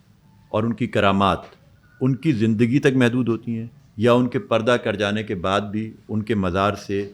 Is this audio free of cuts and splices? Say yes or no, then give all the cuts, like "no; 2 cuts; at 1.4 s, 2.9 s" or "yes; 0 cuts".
yes; 0 cuts